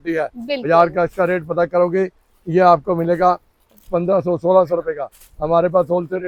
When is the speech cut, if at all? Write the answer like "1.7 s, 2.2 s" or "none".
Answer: none